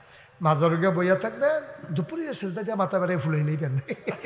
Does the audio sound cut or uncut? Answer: uncut